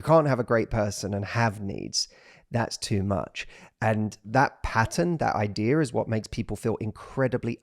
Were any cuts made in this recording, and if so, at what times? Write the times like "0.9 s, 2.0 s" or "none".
4.3 s